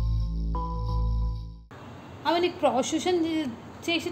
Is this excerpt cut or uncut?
uncut